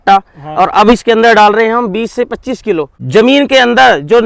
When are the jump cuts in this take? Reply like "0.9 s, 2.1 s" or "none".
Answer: 3.0 s